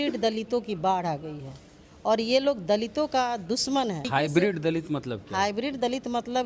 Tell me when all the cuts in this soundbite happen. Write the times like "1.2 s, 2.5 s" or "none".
4.1 s